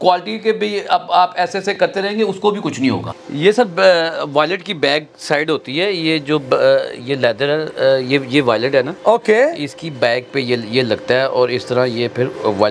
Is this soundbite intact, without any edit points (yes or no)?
no